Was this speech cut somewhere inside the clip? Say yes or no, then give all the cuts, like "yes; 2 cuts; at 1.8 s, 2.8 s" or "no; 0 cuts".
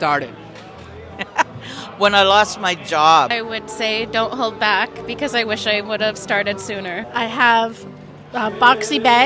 yes; 2 cuts; at 3.4 s, 7.1 s